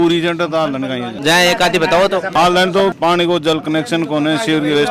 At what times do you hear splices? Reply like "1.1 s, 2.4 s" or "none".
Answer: none